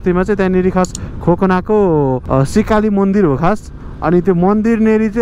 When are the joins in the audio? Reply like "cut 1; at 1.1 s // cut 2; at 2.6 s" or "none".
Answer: cut 1; at 2.2 s

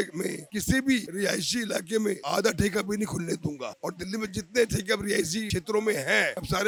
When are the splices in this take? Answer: none

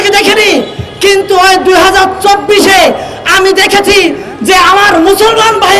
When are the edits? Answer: none

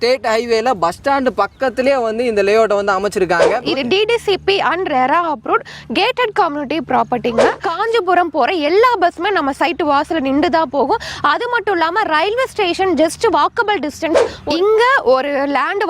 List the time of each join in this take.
cut 1; at 3.6 s // cut 2; at 7.6 s // cut 3; at 14.3 s

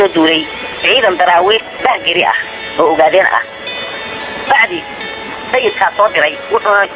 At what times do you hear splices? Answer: cut 1; at 1.6 s

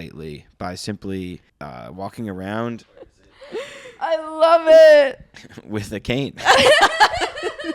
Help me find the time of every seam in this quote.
cut 1; at 1.5 s // cut 2; at 2.9 s

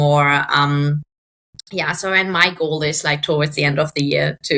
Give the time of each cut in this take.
none

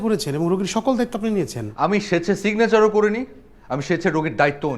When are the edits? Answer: cut 1; at 1.6 s

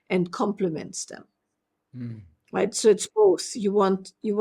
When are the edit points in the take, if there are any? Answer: none

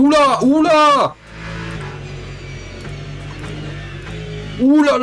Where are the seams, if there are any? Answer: none

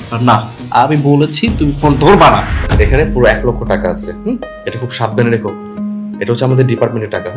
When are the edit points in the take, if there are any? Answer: cut 1; at 2.6 s

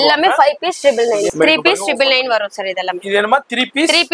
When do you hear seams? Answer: cut 1; at 1.3 s

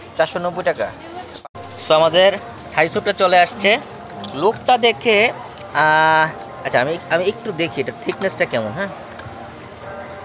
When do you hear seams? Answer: cut 1; at 1.4 s

